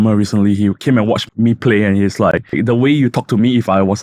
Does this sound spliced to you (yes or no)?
yes